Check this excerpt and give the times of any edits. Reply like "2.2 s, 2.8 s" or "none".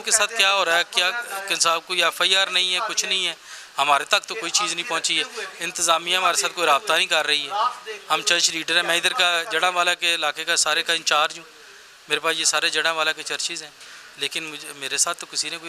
none